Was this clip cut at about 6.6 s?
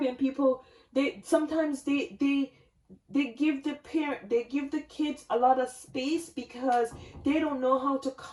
no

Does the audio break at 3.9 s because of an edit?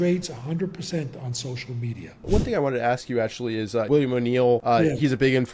yes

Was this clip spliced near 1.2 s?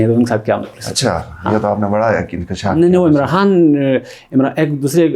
no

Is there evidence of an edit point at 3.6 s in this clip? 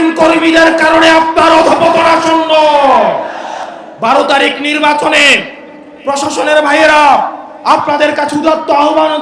yes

